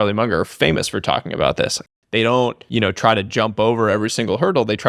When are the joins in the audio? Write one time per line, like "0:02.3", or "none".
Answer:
0:01.9
0:02.6